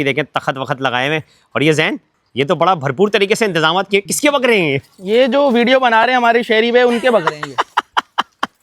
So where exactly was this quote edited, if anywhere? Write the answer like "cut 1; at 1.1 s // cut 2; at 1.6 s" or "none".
none